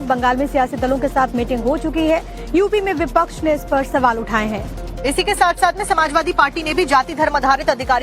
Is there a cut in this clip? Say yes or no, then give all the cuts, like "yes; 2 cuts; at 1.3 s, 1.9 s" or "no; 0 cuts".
yes; 1 cut; at 1.3 s